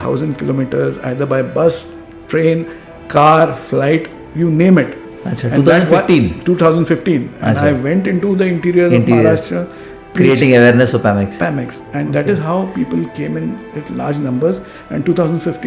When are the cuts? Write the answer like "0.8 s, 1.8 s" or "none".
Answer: none